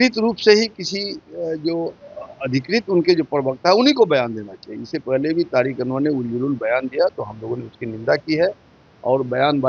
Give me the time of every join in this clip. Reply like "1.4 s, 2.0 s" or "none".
none